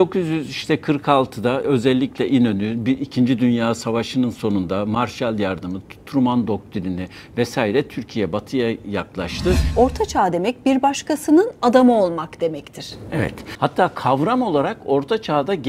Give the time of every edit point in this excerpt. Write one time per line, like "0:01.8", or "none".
0:01.6
0:09.7
0:13.4